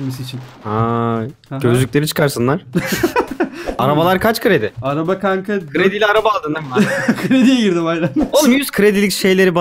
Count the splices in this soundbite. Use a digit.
2